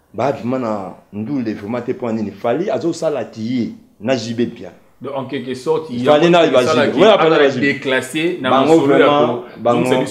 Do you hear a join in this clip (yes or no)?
no